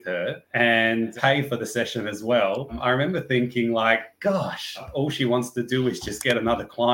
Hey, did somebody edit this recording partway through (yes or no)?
yes